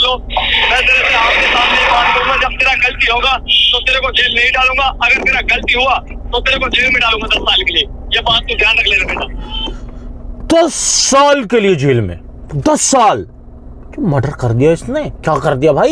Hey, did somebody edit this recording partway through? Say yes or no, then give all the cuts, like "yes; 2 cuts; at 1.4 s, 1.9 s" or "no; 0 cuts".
no; 0 cuts